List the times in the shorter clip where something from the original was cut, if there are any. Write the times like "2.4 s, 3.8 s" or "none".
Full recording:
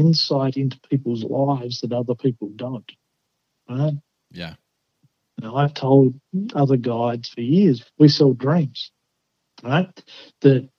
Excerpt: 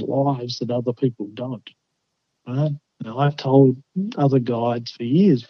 2.9 s